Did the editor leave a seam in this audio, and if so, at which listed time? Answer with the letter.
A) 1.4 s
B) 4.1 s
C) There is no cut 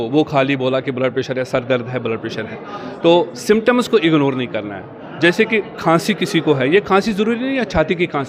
C